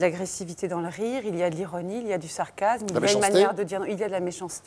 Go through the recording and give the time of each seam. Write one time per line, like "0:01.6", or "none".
none